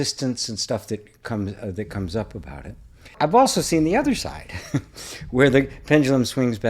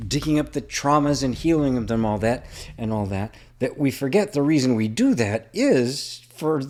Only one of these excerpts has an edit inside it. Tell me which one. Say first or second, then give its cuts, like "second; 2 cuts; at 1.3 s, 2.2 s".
first; 1 cut; at 3.1 s